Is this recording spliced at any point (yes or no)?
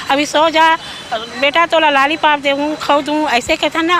no